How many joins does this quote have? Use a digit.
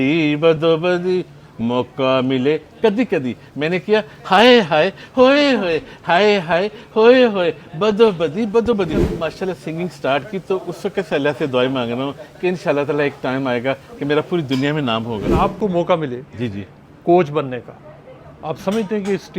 2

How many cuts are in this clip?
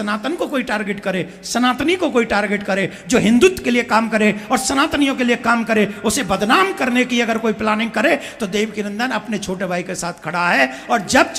0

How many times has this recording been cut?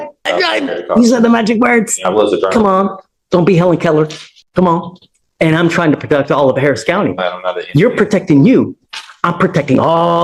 0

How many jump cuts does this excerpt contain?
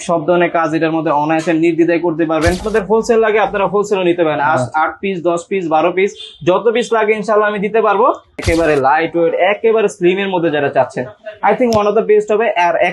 2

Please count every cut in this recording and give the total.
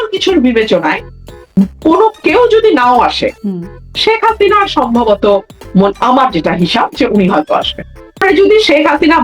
1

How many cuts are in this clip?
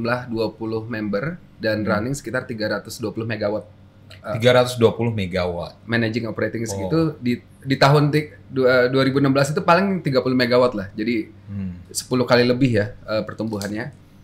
0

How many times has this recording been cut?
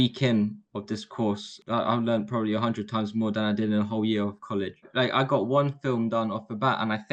2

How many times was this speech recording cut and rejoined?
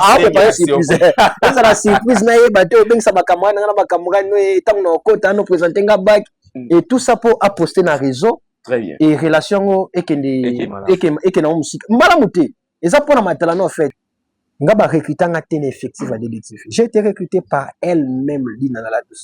1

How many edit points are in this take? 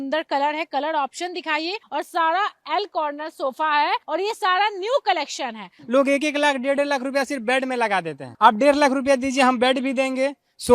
3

